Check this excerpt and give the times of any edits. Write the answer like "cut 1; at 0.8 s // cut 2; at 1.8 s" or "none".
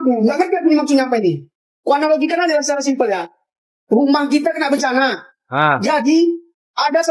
none